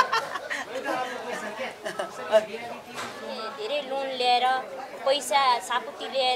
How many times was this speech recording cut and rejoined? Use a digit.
1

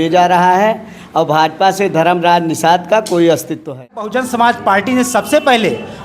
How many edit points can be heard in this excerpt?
1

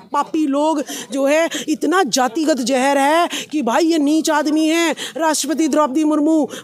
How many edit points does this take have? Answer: 0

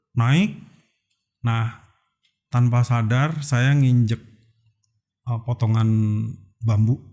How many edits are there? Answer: 0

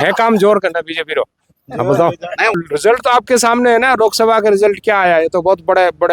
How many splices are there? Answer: 1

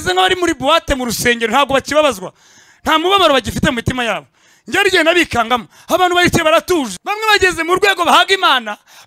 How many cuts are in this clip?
1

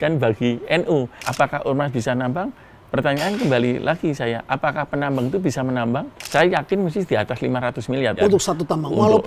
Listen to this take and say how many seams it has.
3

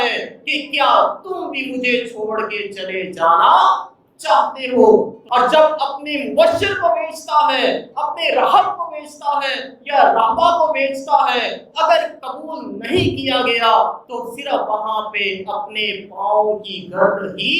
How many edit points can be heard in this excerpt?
1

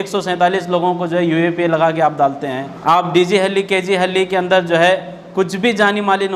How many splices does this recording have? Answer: 1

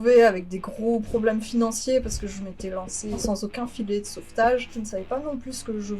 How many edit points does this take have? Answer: 2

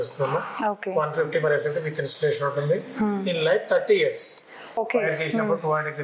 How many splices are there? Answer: 1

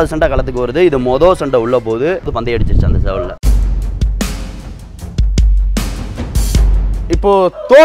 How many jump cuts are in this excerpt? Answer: 3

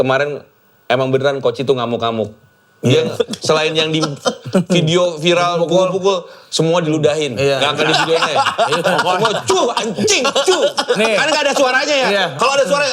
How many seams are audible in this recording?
0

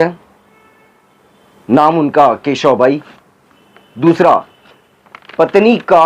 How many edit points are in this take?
0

